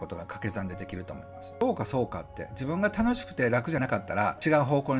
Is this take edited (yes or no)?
yes